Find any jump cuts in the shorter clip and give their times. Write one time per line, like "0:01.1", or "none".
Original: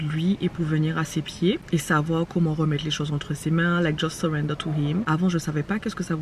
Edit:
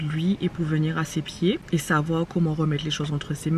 none